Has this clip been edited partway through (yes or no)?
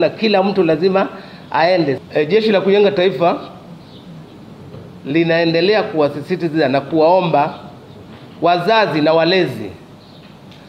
yes